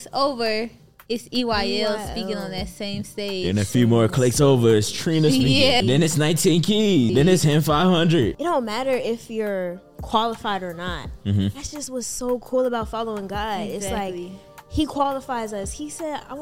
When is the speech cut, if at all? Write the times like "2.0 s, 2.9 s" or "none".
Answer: 5.8 s, 7.1 s, 8.3 s